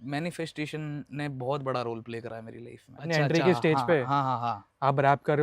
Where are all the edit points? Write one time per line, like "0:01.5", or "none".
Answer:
0:03.1